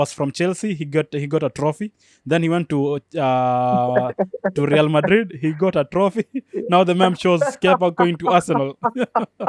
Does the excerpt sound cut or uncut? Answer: uncut